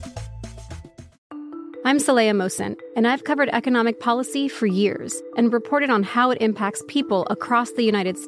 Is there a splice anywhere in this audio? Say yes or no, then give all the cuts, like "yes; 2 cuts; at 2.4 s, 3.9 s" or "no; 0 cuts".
yes; 1 cut; at 1.1 s